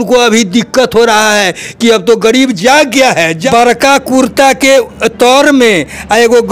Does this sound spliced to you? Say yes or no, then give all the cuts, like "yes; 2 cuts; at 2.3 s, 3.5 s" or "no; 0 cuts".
yes; 1 cut; at 3.4 s